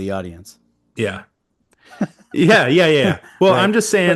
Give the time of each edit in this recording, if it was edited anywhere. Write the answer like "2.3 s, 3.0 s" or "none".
none